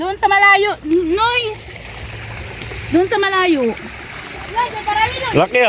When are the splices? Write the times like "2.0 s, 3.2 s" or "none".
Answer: none